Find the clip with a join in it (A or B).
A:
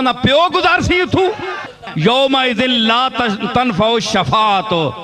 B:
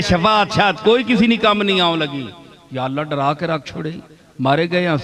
A